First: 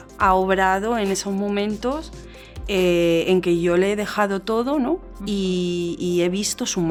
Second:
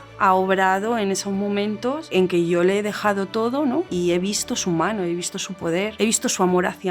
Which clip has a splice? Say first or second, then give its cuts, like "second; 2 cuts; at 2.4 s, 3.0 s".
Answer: second; 3 cuts; at 2.1 s, 3.9 s, 5.9 s